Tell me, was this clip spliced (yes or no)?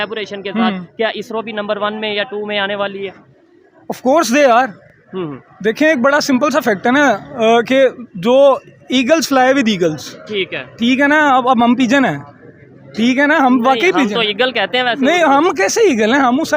no